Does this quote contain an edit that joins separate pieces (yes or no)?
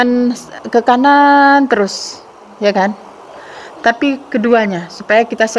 no